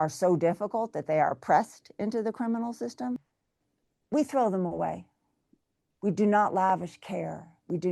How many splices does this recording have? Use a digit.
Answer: 1